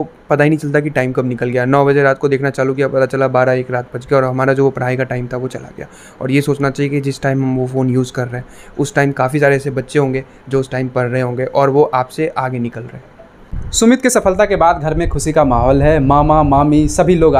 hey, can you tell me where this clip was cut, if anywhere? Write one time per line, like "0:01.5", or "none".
none